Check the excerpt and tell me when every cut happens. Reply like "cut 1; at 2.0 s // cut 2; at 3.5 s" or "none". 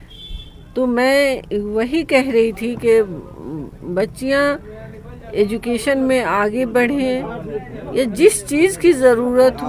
none